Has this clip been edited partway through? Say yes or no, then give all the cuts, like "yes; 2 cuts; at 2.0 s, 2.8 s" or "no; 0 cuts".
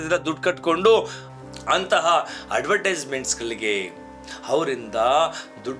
no; 0 cuts